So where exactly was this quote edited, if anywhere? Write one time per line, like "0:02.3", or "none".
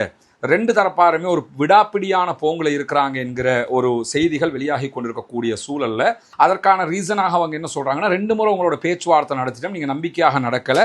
0:06.2